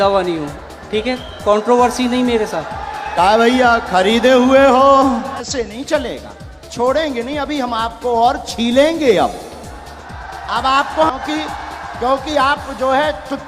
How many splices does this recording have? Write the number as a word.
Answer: two